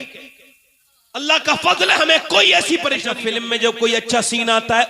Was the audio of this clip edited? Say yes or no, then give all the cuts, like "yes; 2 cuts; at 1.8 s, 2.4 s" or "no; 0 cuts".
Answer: yes; 1 cut; at 3.1 s